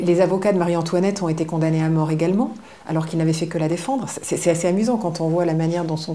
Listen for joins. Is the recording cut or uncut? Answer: uncut